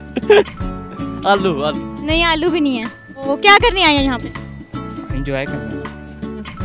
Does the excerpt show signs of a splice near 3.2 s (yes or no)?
yes